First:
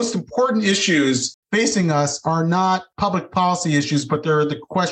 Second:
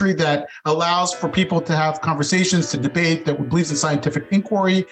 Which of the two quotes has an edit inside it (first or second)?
first